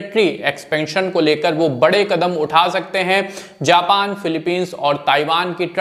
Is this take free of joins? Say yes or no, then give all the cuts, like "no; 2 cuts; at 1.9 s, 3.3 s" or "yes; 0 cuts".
yes; 0 cuts